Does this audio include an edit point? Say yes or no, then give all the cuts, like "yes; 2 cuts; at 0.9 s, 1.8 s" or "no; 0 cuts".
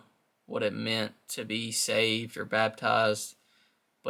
no; 0 cuts